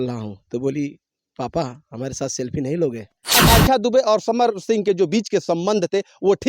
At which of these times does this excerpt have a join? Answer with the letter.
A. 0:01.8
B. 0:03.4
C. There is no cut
B